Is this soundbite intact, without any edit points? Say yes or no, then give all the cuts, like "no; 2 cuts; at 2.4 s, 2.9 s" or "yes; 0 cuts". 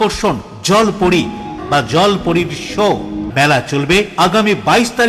no; 2 cuts; at 1.6 s, 3.2 s